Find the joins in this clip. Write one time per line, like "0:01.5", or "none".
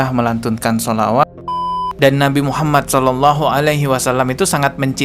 0:01.8